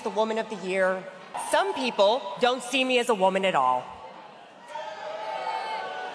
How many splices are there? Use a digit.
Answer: 1